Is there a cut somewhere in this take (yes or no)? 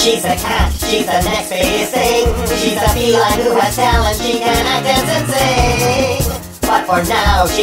no